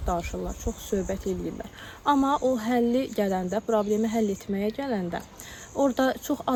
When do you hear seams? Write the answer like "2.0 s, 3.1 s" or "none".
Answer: none

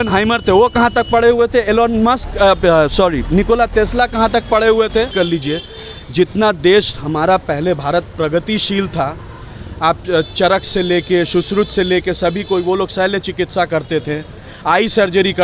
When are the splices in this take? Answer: 5.1 s

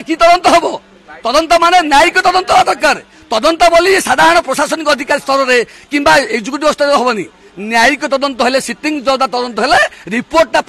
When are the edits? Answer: none

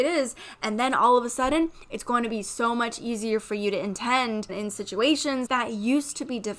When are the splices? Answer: 4.5 s, 5.5 s

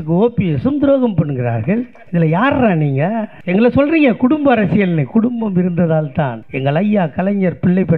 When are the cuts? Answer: 2.0 s, 3.3 s, 6.4 s

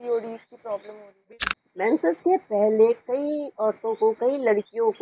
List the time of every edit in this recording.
1.3 s

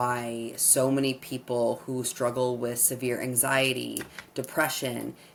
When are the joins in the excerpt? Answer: none

